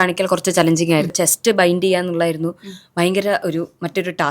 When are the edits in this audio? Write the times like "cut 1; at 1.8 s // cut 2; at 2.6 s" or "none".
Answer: cut 1; at 1.1 s